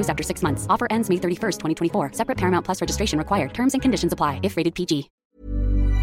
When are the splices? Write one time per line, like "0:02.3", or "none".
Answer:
0:05.1